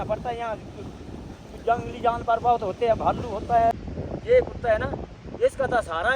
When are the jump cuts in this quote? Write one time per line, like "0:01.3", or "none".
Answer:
0:03.7